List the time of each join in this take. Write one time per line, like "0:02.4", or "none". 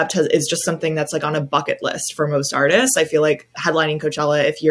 0:03.6